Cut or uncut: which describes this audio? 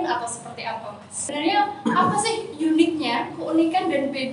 cut